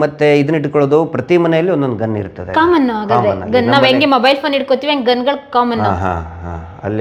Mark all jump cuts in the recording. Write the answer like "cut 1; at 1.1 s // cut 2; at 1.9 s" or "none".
none